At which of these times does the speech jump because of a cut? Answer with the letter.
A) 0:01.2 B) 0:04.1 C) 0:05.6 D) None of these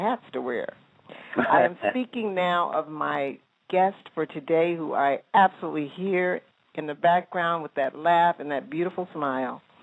A